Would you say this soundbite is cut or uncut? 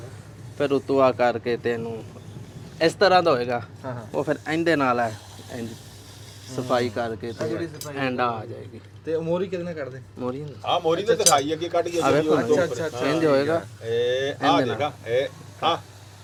uncut